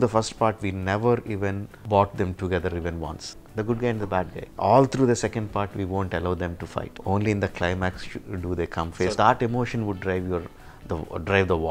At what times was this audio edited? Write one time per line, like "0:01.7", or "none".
0:01.7
0:03.3
0:04.4
0:06.9
0:09.1